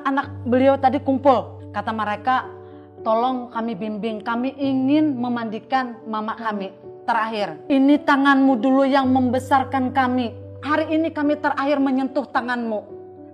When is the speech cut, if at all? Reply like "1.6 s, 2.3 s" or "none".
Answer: 1.6 s, 7.6 s, 10.6 s